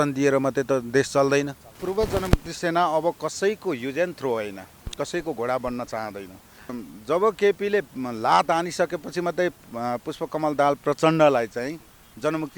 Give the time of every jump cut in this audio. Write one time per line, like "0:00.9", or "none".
0:01.8
0:06.8